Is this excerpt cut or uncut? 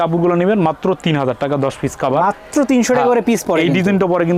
uncut